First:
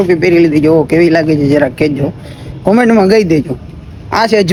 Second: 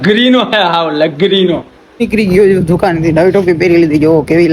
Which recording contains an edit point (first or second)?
second